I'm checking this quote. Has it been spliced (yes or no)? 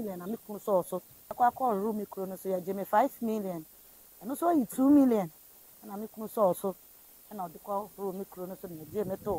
yes